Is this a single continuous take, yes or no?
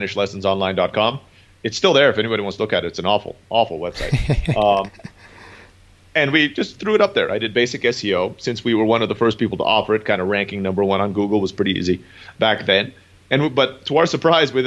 yes